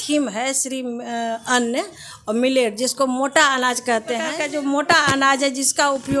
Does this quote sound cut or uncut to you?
cut